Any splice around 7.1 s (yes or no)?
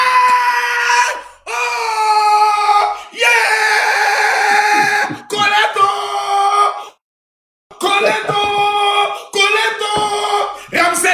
no